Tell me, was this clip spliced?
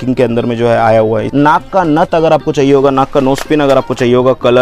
yes; 1 cut; at 1.3 s

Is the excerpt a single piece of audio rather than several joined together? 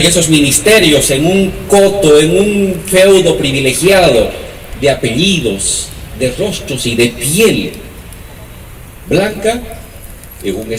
yes; 0 cuts

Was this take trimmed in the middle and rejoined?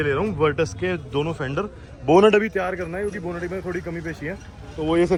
no; 0 cuts

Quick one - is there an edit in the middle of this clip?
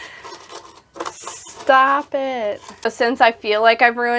yes; 1 cut; at 2.9 s

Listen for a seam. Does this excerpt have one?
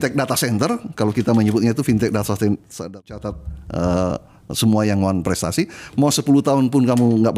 yes; 1 cut; at 3.0 s

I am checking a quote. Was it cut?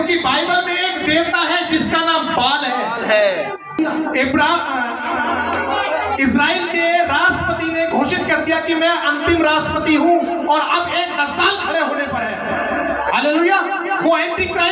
yes; 1 cut; at 3.8 s

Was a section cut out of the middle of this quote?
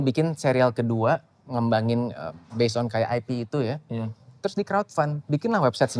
no; 0 cuts

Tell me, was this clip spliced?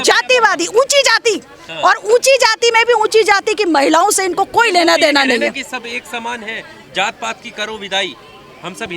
no; 0 cuts

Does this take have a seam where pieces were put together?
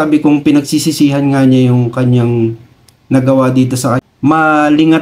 yes; 1 cut; at 4.0 s

